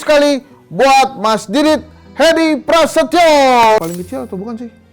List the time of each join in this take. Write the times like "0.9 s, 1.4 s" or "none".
3.8 s